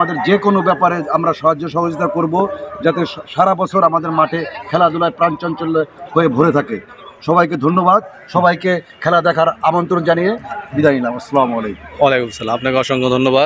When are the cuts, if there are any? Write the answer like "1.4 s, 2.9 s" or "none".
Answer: none